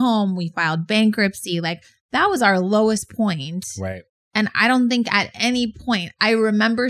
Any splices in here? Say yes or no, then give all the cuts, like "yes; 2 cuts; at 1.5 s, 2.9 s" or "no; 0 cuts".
no; 0 cuts